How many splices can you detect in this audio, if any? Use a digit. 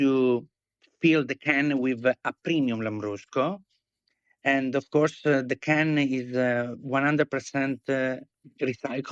0